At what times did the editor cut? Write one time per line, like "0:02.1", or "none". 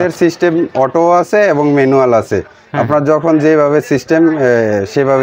none